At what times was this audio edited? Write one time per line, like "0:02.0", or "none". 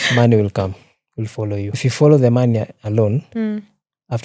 0:01.7